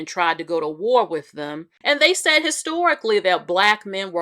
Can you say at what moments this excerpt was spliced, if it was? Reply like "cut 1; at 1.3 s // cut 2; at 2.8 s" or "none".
cut 1; at 1.7 s